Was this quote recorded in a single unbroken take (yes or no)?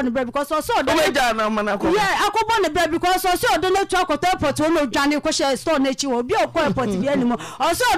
yes